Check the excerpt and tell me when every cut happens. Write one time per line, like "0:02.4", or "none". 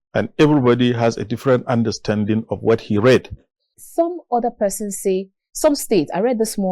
0:03.8